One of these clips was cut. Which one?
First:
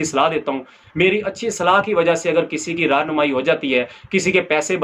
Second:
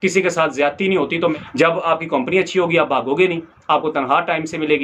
second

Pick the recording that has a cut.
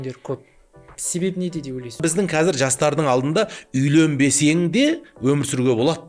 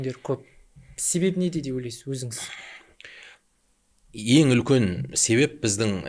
first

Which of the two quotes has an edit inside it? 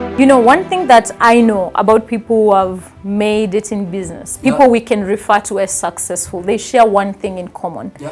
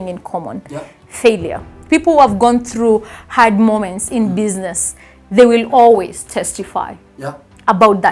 second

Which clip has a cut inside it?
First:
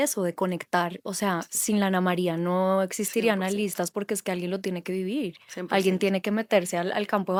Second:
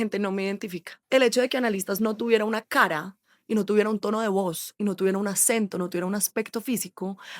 second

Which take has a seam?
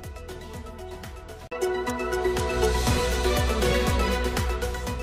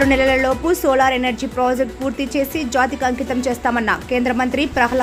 first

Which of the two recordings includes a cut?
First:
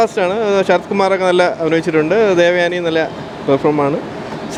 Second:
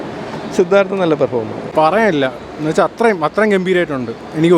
second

